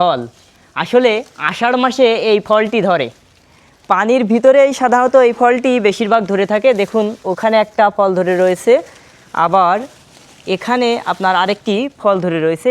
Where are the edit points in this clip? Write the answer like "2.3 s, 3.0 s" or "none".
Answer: none